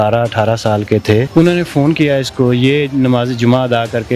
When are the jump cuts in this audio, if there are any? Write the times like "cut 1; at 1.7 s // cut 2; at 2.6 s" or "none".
cut 1; at 1.3 s